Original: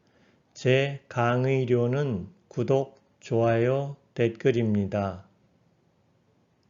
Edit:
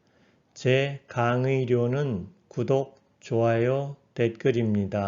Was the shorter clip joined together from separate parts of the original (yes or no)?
no